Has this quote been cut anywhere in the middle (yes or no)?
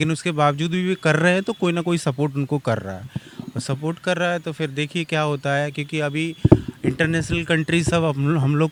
no